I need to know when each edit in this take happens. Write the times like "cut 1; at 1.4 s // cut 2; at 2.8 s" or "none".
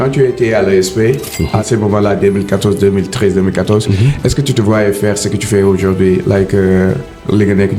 none